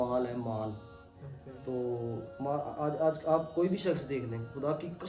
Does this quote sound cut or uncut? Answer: uncut